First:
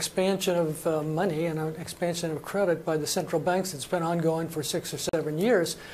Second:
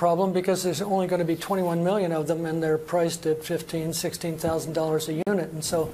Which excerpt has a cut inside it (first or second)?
first